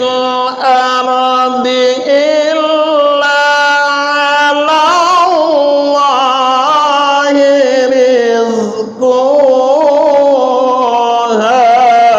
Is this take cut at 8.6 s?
no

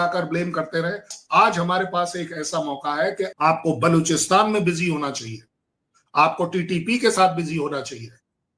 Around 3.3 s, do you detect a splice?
yes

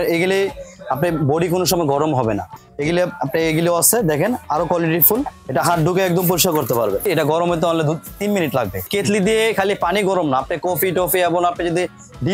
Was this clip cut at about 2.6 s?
yes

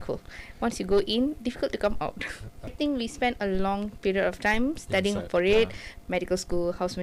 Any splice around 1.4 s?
no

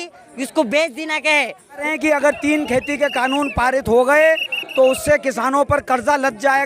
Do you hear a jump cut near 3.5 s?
no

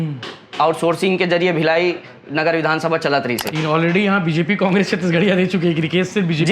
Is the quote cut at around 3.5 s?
yes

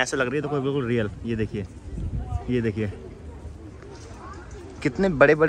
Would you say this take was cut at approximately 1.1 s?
no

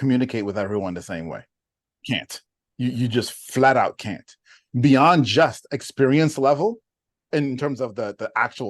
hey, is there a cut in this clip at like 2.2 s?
yes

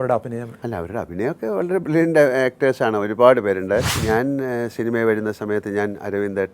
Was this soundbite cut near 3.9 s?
yes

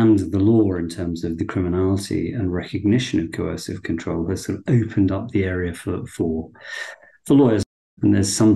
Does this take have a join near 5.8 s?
no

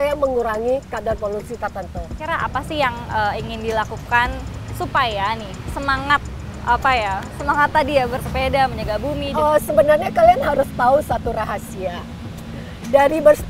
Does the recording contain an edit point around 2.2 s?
yes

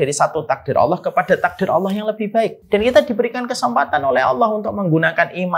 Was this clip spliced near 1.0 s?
no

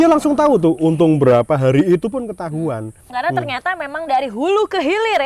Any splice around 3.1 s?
yes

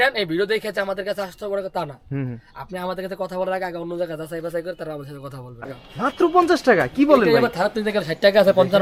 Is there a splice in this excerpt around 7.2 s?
no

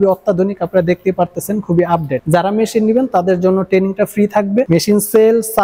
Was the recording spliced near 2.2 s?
yes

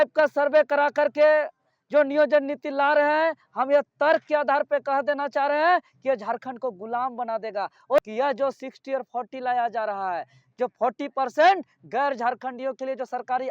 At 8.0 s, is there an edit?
yes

